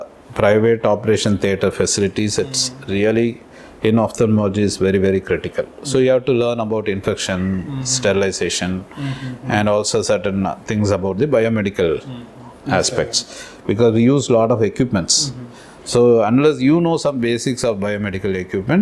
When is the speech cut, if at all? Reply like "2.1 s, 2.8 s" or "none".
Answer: none